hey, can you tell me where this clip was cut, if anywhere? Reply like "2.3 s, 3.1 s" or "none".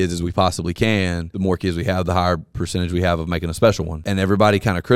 1.3 s, 3.9 s